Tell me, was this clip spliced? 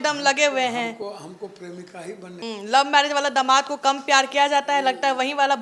yes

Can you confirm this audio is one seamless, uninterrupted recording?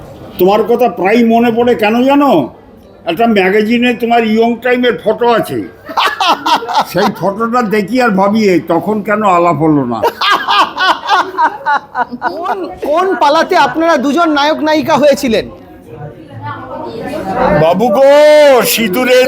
no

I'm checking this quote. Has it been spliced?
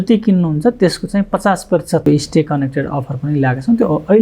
yes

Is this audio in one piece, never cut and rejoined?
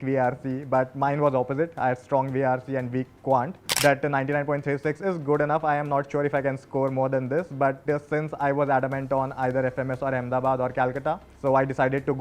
no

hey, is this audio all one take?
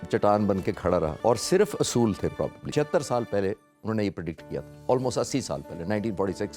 no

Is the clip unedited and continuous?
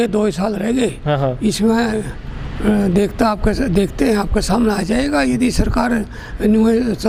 yes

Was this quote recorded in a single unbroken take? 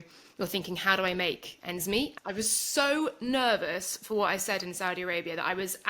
no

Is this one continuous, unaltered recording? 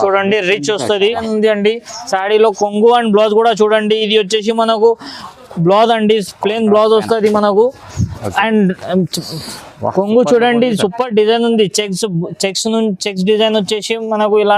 no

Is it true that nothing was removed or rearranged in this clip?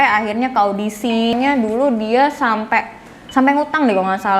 no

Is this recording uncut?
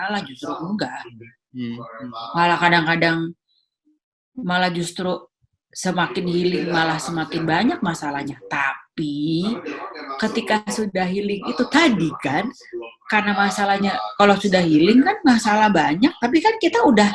yes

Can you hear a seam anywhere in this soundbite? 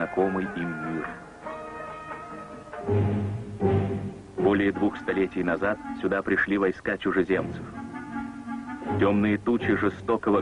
no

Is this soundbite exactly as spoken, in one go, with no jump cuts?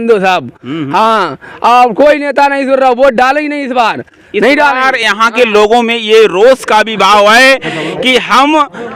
yes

